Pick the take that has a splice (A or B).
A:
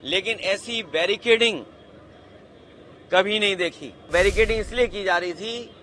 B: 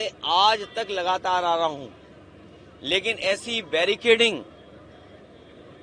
A